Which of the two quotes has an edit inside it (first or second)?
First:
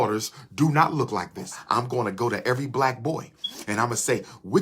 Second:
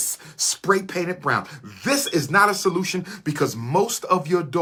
first